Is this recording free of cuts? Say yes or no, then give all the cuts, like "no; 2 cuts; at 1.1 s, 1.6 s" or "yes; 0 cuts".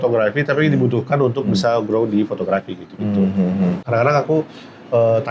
no; 1 cut; at 3.8 s